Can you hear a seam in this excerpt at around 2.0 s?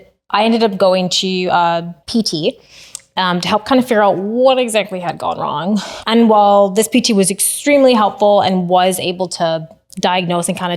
yes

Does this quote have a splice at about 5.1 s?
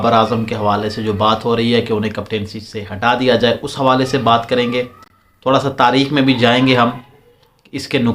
no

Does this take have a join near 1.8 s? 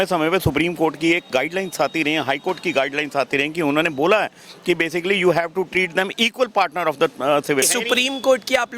no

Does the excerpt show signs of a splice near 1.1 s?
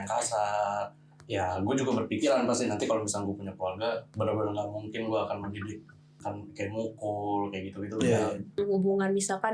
yes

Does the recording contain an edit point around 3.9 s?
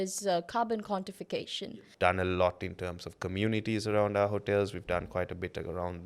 no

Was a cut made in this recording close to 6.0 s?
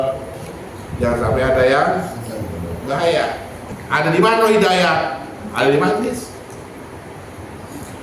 no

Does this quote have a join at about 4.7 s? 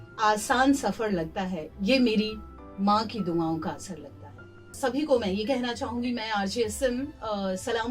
yes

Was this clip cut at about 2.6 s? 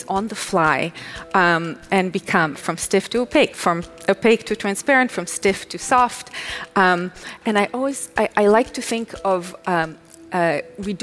yes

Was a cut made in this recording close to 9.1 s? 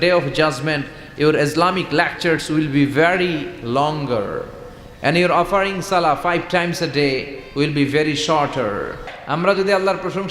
yes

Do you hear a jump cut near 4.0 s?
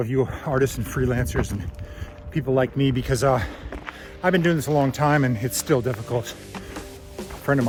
no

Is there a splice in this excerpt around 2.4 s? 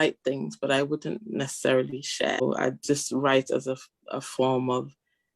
yes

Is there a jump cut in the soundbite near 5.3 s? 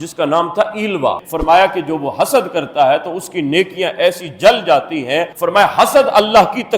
yes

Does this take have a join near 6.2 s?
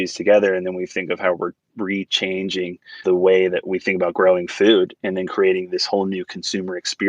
no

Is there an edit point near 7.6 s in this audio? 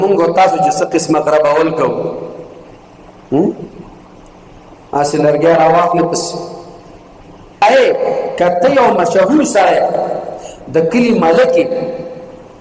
yes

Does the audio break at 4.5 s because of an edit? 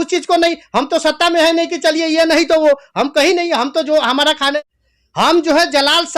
yes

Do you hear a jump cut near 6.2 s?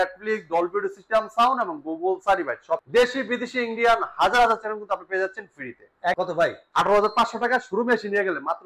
yes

